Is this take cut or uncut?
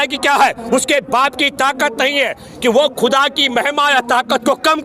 uncut